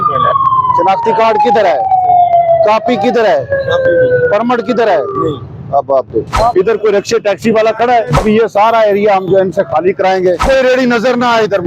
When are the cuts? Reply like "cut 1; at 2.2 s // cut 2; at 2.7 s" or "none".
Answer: cut 1; at 6.3 s // cut 2; at 8.1 s // cut 3; at 10.4 s